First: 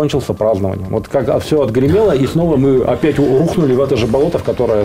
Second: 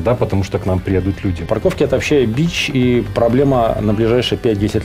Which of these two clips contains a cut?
second; 1 cut; at 1.4 s

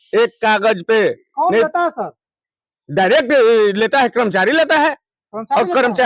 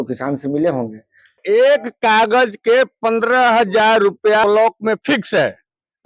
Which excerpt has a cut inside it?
second; 2 cuts; at 1.4 s, 4.4 s

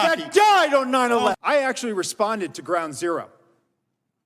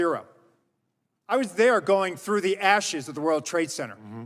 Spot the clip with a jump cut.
first; 1 cut; at 1.3 s

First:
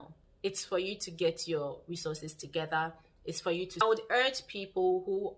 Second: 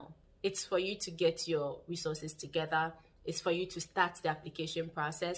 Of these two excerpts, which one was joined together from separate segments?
first; 1 cut; at 3.8 s

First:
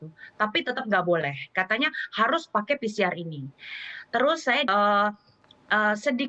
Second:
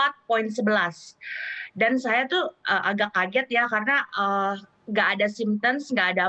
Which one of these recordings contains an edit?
first; 1 cut; at 4.7 s

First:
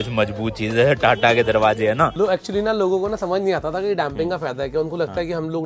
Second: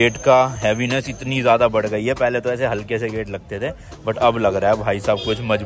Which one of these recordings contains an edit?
first; 1 cut; at 2.1 s

